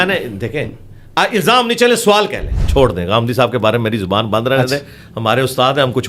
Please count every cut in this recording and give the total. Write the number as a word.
one